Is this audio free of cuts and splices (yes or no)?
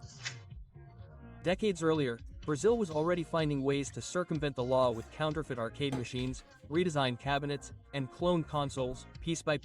no